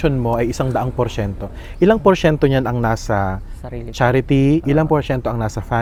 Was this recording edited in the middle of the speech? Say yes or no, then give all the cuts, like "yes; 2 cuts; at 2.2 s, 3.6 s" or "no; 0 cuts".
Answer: no; 0 cuts